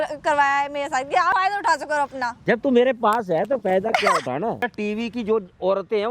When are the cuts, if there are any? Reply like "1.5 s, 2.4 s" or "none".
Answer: 1.3 s, 2.4 s, 4.6 s

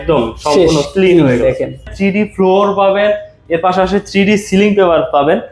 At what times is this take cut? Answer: 1.9 s

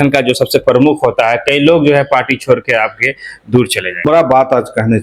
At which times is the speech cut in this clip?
4.1 s

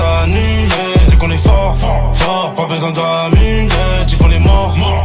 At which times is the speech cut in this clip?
none

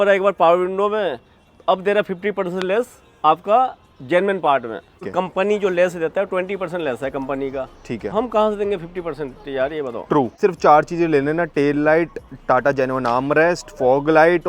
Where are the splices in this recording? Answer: 5.1 s, 10.4 s

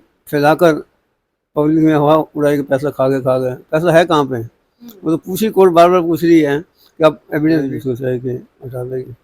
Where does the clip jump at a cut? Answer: 7.7 s

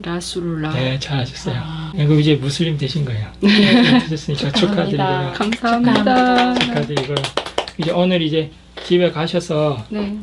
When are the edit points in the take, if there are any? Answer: 1.9 s

